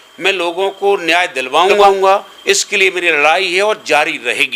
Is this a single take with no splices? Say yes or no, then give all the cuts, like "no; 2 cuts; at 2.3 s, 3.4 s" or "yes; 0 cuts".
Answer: no; 1 cut; at 1.8 s